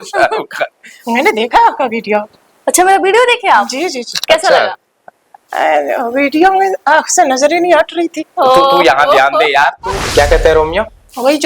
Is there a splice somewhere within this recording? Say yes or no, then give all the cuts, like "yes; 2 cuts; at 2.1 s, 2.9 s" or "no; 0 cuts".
yes; 1 cut; at 9.9 s